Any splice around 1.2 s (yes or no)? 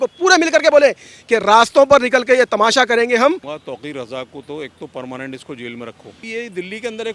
no